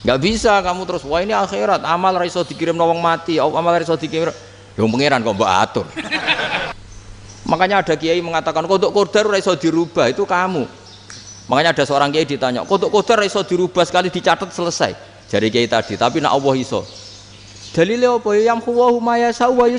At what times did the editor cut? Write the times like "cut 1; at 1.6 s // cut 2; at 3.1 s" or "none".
cut 1; at 6.7 s